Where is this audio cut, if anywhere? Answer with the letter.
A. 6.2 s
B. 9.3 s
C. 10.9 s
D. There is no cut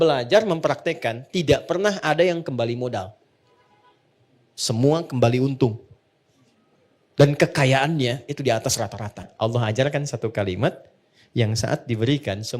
B